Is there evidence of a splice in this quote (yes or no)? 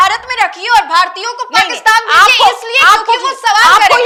no